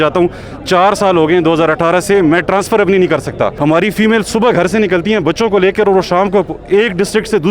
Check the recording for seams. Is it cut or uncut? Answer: cut